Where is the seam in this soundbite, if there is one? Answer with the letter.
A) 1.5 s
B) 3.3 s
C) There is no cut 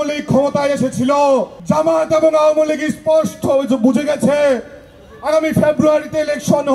A